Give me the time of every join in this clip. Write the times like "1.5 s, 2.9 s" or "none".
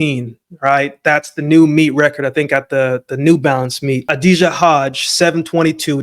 4.1 s